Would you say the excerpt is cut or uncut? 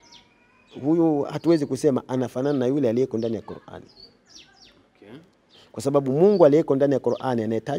uncut